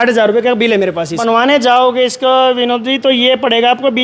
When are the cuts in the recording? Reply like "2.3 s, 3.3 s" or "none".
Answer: 1.2 s